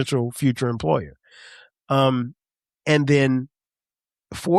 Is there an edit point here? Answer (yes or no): no